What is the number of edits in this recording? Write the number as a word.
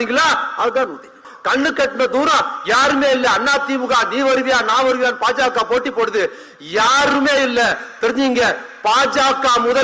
one